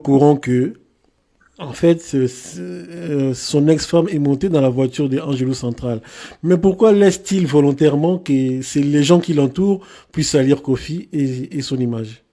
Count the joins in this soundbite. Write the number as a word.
zero